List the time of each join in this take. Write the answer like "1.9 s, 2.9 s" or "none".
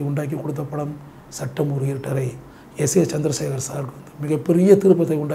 none